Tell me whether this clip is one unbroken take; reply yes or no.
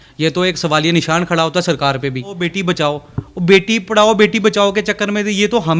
no